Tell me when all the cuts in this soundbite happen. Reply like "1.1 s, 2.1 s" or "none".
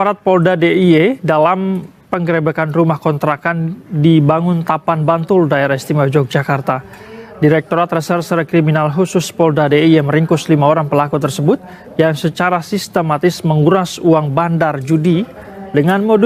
none